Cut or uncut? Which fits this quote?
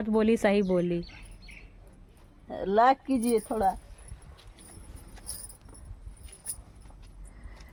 uncut